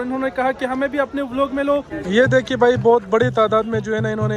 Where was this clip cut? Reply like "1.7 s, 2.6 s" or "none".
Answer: 1.9 s